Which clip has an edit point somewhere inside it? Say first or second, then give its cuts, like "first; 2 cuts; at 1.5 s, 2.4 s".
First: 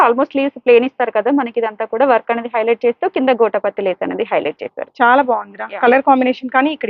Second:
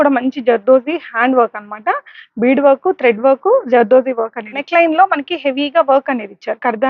second; 1 cut; at 4.6 s